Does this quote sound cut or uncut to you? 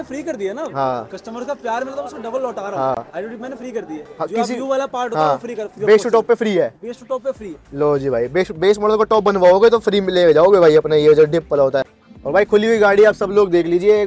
uncut